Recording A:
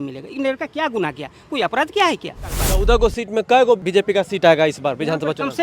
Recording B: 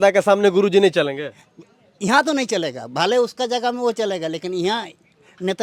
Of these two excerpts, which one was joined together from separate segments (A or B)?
A